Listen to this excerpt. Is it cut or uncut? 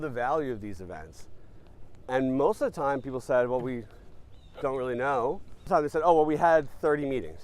cut